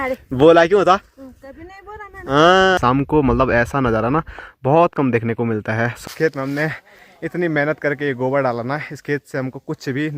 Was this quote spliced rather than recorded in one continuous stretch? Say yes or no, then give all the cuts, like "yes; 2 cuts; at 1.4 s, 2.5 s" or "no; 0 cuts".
yes; 2 cuts; at 2.8 s, 6.0 s